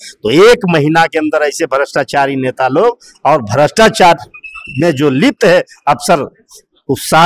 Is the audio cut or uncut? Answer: uncut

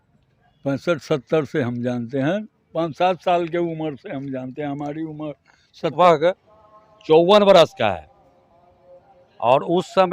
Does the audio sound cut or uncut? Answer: cut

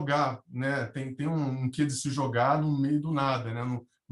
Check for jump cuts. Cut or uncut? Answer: uncut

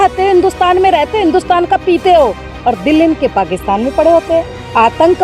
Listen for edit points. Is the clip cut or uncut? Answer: uncut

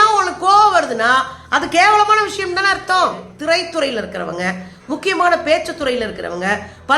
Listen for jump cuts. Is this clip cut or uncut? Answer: cut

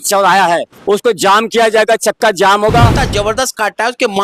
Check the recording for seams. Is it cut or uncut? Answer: cut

